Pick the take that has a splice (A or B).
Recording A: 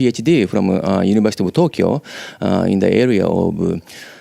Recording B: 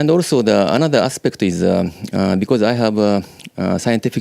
B